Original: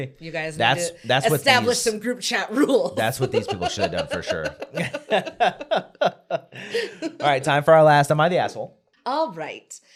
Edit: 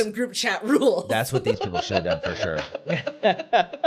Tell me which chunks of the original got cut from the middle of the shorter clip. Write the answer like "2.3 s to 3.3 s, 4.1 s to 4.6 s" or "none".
none